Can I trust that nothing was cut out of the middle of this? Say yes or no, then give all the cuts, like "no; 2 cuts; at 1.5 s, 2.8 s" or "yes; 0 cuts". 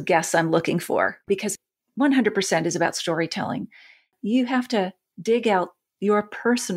no; 3 cuts; at 1.2 s, 4.1 s, 5.0 s